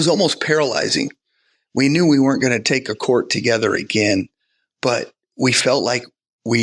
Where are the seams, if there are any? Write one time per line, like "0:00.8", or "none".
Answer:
0:01.5